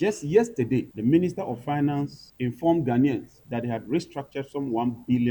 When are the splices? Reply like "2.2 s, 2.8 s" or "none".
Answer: 0.9 s, 2.2 s, 3.4 s

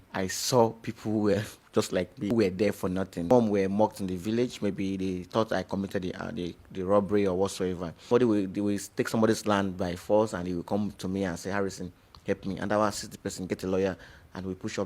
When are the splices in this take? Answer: 2.3 s, 3.2 s, 8.1 s

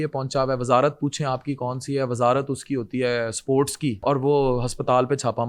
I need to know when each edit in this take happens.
4.0 s

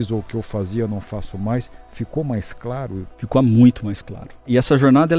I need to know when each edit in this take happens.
3.1 s, 4.5 s

